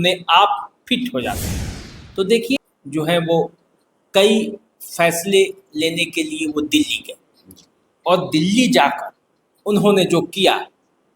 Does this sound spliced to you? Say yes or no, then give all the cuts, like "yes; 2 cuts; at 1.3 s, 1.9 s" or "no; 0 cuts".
yes; 1 cut; at 2.6 s